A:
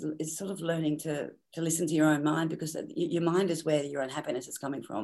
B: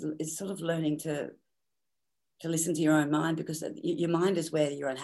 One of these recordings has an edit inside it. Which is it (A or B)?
A